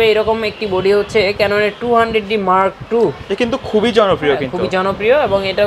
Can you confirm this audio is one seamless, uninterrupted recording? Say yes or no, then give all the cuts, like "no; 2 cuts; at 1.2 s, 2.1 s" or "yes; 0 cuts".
yes; 0 cuts